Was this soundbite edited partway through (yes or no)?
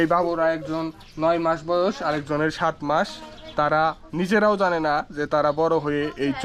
no